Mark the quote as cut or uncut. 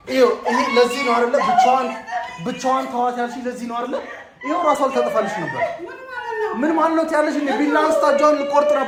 uncut